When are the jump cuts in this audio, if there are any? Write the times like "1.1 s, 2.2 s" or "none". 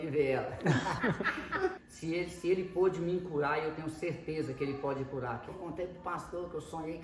1.8 s, 5.6 s

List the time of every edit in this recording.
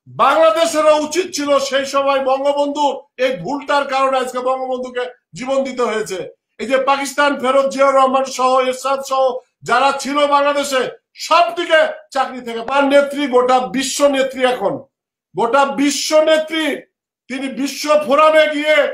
12.7 s

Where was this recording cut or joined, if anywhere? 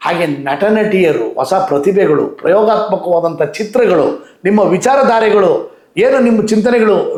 none

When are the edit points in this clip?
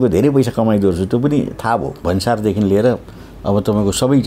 2.0 s

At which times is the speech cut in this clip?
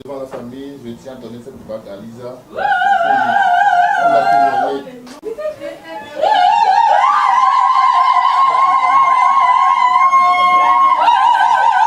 5.0 s

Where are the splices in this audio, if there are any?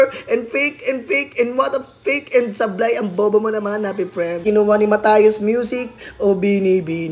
4.4 s

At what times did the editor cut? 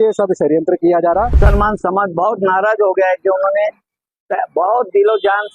1.3 s

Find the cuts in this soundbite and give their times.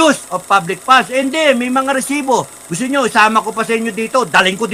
none

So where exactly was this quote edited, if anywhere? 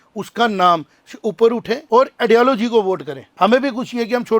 1.8 s, 3.2 s

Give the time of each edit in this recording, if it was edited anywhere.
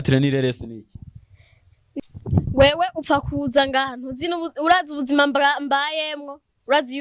1.9 s

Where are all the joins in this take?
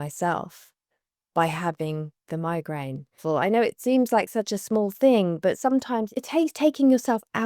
3.2 s, 6.1 s

